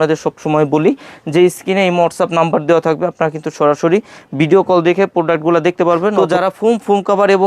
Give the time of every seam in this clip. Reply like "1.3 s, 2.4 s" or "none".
6.1 s